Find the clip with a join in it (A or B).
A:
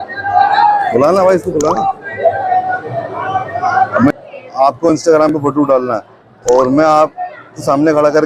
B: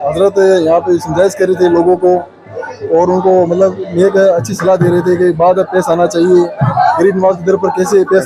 A